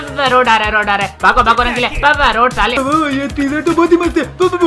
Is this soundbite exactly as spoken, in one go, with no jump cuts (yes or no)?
no